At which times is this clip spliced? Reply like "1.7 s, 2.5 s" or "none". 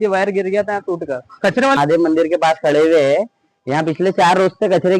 1.8 s